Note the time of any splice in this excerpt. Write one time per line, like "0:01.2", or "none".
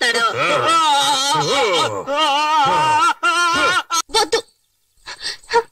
0:04.0